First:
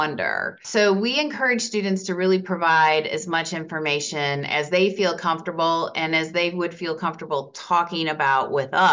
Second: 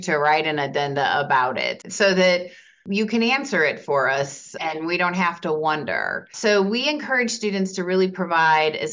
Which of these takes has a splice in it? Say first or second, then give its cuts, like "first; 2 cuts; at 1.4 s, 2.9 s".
second; 2 cuts; at 1.8 s, 2.8 s